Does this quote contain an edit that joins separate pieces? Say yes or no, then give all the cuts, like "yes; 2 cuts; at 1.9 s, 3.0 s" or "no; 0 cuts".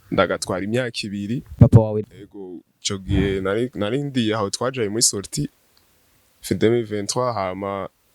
yes; 1 cut; at 1.5 s